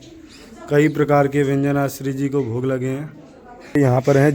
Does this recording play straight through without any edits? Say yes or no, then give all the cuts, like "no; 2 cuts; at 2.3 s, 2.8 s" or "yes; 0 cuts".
no; 1 cut; at 3.2 s